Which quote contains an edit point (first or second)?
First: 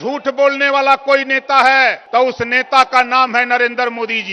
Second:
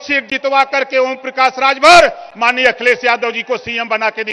first